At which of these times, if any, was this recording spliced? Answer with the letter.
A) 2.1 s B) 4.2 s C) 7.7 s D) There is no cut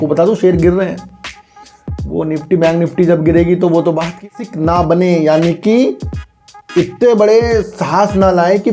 B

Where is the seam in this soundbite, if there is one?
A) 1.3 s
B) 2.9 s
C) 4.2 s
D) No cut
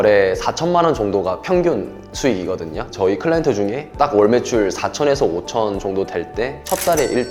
D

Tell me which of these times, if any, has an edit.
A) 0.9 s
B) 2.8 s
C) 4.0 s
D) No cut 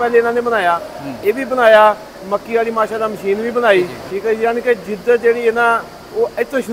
C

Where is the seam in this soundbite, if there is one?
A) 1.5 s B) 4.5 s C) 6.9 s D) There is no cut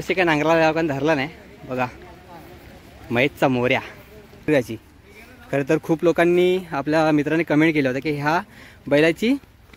B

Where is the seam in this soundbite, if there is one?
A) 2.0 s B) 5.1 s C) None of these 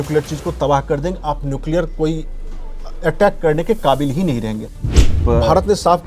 B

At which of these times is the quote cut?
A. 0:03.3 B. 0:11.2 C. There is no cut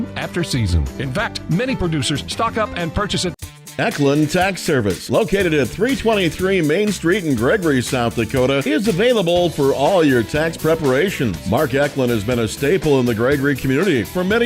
A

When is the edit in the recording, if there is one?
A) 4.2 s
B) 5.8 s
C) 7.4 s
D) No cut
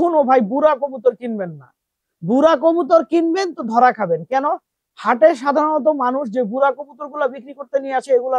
D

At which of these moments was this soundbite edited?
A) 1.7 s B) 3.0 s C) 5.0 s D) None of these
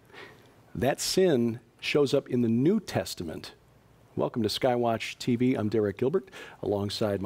D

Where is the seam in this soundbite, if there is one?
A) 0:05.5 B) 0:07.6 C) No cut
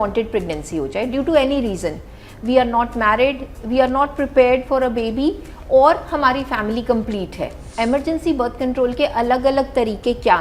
B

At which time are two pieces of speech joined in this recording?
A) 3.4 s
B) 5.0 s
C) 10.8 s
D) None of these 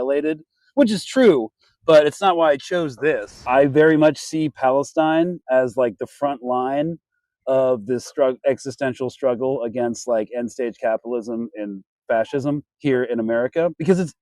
A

